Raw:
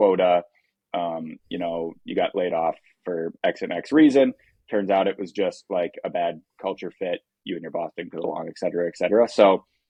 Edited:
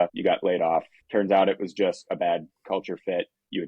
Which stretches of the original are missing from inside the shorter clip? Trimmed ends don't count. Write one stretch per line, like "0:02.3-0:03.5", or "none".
0:01.1-0:04.3
0:05.6-0:06.0